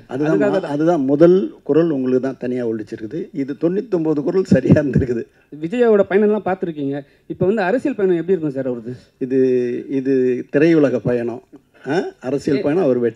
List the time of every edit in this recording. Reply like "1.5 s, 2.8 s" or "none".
5.4 s

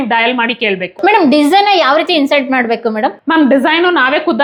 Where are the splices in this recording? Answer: none

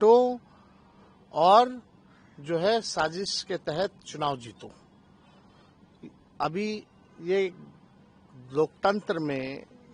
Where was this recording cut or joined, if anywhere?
none

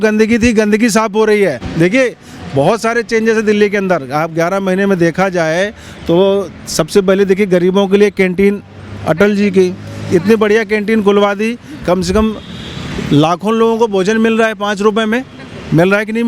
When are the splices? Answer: 1.6 s

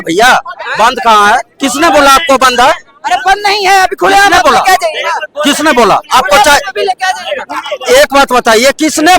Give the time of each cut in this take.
none

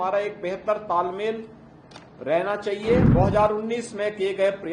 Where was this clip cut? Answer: 3.1 s

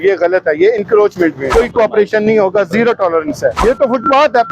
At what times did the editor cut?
1.4 s, 3.6 s

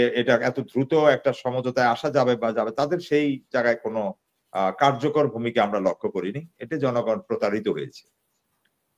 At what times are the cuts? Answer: none

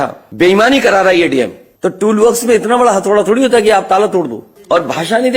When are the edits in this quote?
1.7 s, 4.4 s

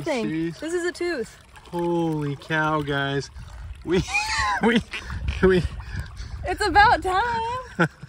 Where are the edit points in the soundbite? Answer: none

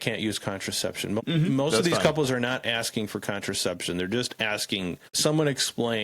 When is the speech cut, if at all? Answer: 1.2 s, 5.1 s

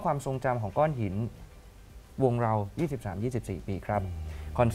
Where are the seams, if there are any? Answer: none

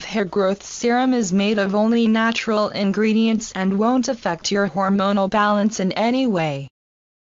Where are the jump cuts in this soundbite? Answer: 4.6 s

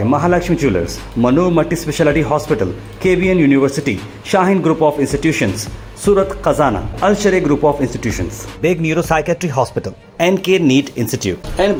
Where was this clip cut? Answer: none

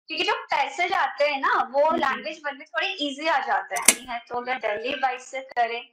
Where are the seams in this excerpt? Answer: 4.0 s

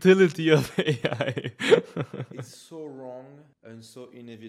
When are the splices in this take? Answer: 2.5 s, 3.5 s

